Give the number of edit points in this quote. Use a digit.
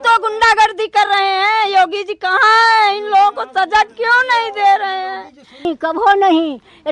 1